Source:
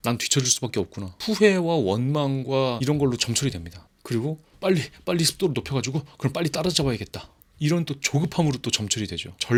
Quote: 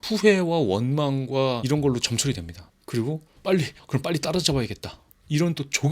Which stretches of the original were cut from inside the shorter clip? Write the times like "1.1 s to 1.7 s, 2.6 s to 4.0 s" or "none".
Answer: 4.9 s to 6.1 s